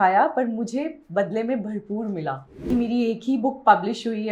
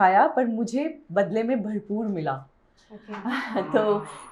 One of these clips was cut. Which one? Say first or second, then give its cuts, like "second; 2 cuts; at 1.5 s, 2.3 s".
first; 1 cut; at 2.6 s